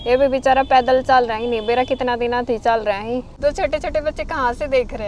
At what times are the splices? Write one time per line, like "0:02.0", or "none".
0:03.3

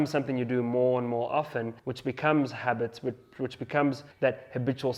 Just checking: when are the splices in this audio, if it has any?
0:01.8
0:04.1

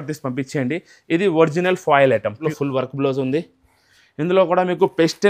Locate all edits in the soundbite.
0:02.4

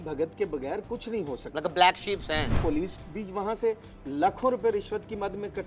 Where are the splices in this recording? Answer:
0:02.6

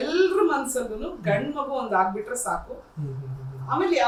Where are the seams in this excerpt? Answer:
none

